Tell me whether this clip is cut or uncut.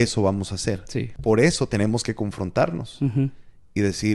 cut